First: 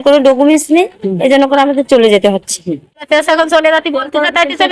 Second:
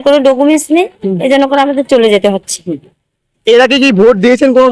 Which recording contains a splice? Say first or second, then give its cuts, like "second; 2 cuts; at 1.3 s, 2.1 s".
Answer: first; 1 cut; at 3.0 s